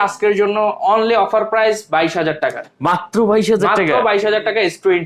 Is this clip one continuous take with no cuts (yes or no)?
yes